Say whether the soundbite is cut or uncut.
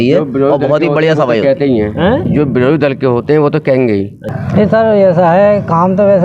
cut